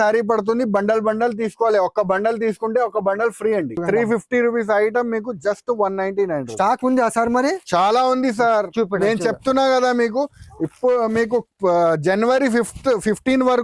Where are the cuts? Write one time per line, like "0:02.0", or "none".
0:03.7